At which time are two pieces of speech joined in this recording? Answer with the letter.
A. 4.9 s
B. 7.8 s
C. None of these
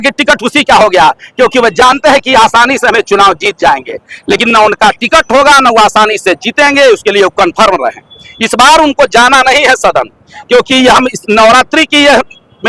C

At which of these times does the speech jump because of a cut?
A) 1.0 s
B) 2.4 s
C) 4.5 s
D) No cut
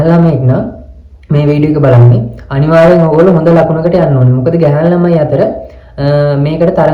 D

